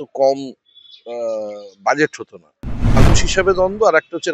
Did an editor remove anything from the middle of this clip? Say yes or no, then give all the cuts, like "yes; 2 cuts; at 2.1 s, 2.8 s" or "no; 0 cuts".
yes; 1 cut; at 3.0 s